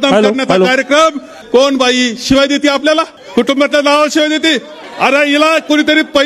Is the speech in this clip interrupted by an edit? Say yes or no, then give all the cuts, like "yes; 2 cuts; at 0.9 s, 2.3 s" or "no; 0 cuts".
yes; 3 cuts; at 1.4 s, 3.2 s, 4.8 s